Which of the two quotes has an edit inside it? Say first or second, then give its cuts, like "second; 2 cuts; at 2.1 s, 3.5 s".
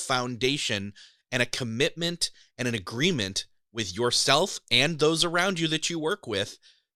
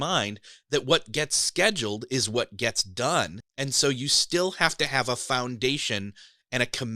second; 1 cut; at 3.4 s